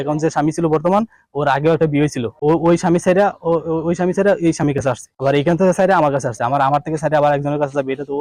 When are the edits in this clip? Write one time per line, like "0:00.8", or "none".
none